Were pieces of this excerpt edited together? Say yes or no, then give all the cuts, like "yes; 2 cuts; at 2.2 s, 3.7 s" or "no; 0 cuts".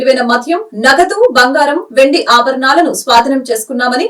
no; 0 cuts